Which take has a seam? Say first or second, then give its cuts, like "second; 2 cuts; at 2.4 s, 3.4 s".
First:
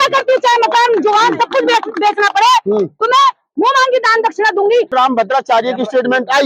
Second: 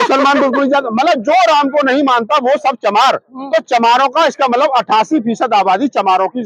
first; 1 cut; at 4.9 s